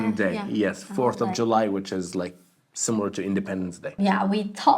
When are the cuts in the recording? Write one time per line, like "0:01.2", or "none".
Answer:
0:03.9